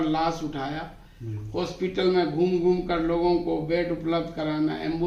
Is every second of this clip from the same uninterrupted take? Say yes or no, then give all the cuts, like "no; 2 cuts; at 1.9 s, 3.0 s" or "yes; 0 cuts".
yes; 0 cuts